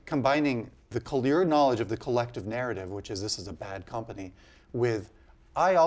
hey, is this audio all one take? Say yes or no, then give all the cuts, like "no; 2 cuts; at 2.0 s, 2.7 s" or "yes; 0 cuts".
no; 1 cut; at 0.9 s